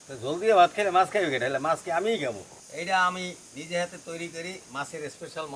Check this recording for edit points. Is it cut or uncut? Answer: cut